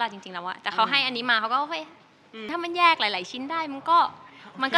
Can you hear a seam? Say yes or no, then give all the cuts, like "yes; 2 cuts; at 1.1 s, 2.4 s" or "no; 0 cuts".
yes; 1 cut; at 2.5 s